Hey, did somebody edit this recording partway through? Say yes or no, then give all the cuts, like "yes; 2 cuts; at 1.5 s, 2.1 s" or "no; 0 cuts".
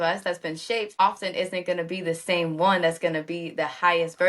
yes; 1 cut; at 1.0 s